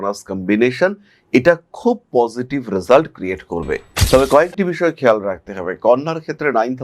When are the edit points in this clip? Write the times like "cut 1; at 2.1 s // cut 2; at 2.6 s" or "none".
cut 1; at 3.9 s